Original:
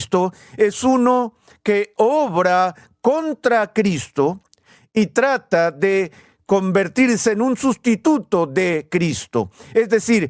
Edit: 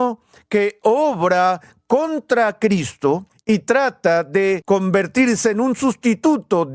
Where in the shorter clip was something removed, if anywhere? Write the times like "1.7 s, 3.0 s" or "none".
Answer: 3.3 s, 4.6 s

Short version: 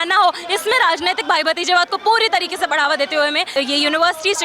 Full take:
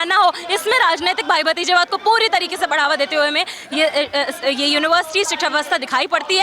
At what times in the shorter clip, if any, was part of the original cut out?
3.5 s

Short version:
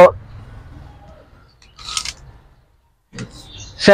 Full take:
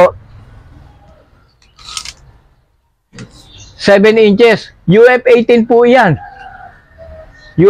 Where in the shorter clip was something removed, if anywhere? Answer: none

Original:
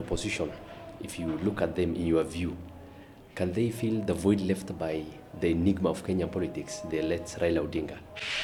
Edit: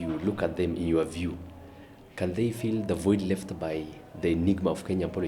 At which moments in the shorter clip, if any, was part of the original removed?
none

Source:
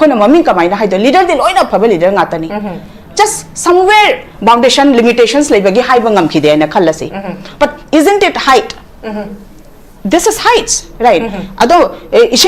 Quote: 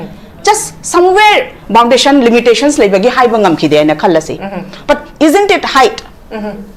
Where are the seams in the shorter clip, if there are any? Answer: none

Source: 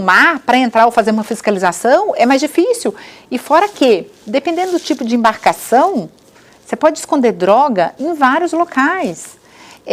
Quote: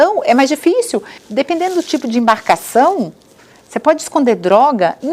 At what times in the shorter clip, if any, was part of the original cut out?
1.2 s

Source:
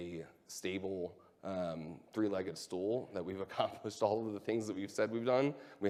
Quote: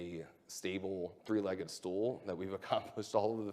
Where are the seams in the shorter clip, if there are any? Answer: 1.2 s

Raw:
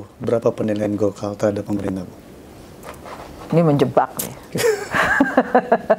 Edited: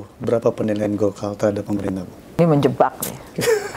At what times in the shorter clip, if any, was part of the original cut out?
2.4 s

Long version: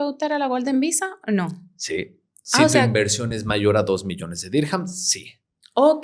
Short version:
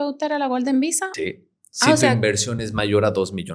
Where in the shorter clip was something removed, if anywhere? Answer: 1.1 s

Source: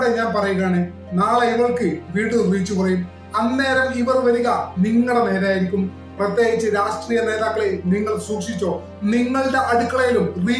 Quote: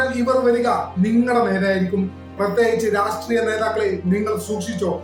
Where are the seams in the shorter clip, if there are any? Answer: none

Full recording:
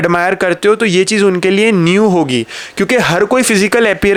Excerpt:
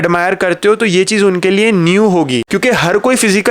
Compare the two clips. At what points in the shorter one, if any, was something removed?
2.5 s

